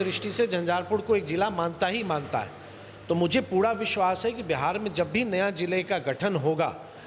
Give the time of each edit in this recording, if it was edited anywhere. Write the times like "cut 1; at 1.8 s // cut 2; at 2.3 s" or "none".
none